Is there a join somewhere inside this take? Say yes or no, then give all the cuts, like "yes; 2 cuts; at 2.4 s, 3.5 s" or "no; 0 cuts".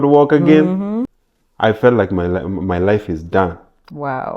yes; 1 cut; at 1.2 s